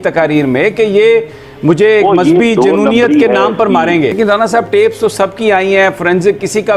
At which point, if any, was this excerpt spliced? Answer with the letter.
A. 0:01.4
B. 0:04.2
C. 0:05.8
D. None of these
B